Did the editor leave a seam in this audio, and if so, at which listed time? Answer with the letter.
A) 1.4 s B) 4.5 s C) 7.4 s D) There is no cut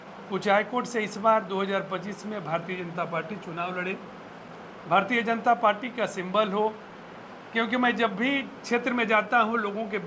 D